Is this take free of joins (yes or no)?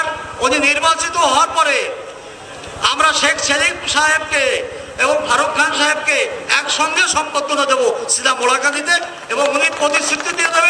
yes